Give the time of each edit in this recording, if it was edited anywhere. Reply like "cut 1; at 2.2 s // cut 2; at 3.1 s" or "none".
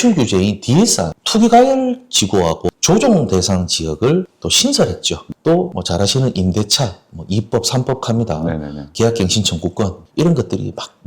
cut 1; at 1.2 s // cut 2; at 2.7 s // cut 3; at 10.0 s